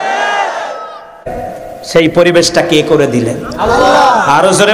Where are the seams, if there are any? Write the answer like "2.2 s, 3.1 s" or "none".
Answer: 1.3 s